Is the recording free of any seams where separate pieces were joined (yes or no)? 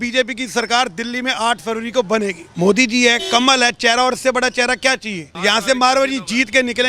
no